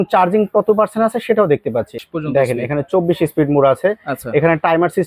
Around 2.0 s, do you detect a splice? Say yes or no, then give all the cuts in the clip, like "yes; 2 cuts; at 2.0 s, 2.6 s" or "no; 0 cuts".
yes; 1 cut; at 2.0 s